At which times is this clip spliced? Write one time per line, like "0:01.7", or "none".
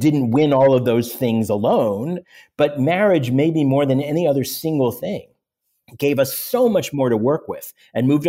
0:02.2